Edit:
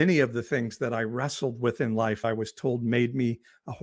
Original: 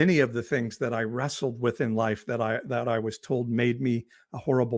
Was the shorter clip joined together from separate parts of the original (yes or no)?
yes